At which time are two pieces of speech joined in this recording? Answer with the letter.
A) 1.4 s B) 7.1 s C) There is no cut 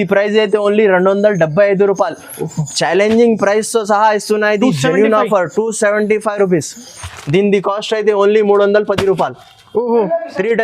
B